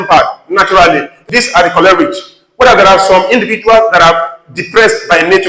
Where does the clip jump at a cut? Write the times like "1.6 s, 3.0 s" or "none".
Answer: 1.2 s